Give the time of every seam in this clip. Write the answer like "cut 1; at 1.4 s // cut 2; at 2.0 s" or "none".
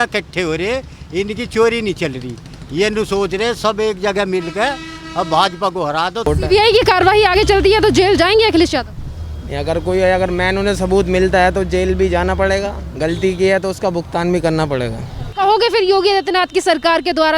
cut 1; at 6.3 s // cut 2; at 15.3 s